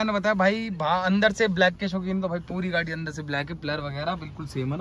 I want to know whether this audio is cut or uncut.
uncut